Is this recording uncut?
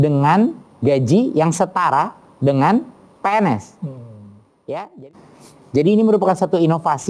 no; 1 cut; at 5.1 s

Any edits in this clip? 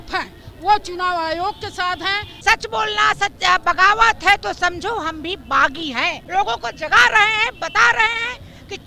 yes; 2 cuts; at 2.4 s, 6.2 s

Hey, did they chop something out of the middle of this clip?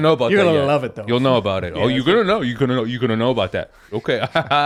no; 0 cuts

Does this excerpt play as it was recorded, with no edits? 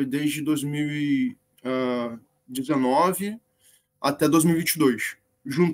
yes; 0 cuts

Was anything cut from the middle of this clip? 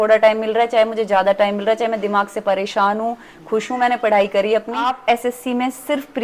yes; 1 cut; at 5.0 s

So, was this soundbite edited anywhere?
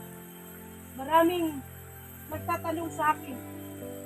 yes; 2 cuts; at 0.9 s, 3.1 s

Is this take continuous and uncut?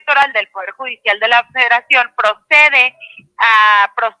yes; 0 cuts

